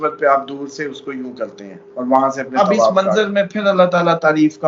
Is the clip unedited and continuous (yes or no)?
no